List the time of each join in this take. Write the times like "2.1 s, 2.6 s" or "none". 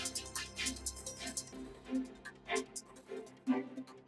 none